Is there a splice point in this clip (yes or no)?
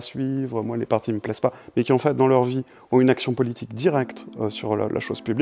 no